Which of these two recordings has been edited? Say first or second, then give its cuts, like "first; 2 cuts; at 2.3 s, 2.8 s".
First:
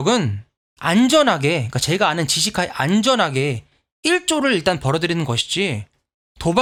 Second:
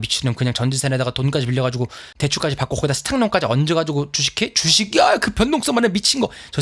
second; 1 cut; at 2.1 s